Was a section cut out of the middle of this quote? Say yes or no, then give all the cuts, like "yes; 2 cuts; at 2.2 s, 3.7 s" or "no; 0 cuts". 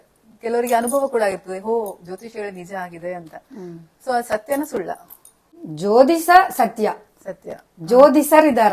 no; 0 cuts